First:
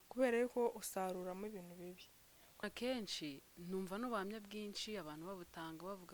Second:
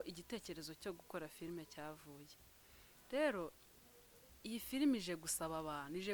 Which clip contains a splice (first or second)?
first